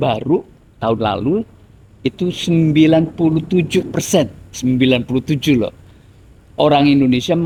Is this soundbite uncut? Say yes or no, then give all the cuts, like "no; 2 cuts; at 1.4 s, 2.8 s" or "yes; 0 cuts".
yes; 0 cuts